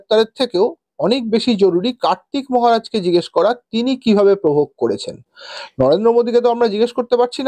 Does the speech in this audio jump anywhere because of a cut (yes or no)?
no